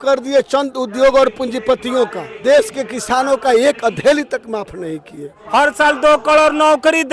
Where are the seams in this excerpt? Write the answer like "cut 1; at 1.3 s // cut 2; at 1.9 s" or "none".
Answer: cut 1; at 2.4 s // cut 2; at 5.3 s